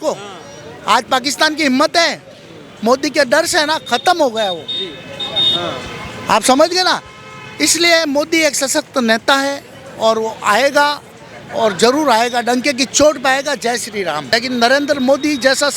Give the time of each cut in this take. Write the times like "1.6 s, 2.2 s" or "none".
14.2 s